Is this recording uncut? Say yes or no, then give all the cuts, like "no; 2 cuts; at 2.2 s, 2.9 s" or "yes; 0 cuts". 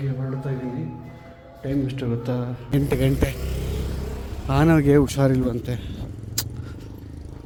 yes; 0 cuts